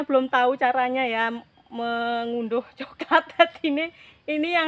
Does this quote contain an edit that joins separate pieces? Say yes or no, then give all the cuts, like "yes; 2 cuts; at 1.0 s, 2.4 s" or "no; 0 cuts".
no; 0 cuts